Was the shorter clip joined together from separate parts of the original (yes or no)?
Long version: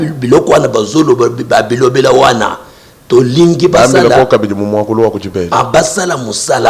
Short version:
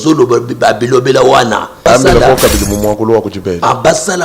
yes